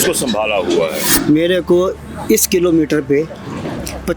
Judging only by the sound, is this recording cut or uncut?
cut